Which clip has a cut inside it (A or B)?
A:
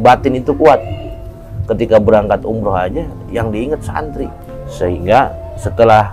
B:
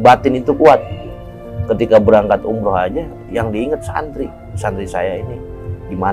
A